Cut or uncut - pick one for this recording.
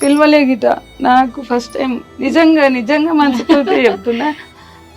uncut